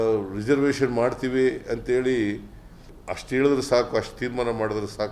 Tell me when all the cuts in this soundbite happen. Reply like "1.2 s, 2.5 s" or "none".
2.9 s